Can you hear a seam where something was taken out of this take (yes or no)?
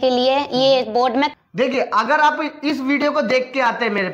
yes